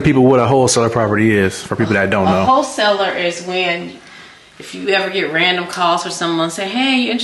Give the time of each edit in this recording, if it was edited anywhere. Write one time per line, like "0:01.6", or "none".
none